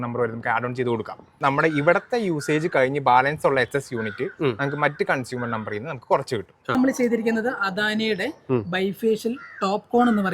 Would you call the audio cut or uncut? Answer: cut